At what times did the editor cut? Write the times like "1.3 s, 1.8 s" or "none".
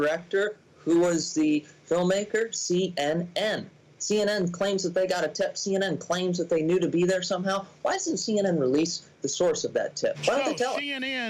10.2 s